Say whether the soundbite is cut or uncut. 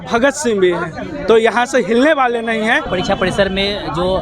cut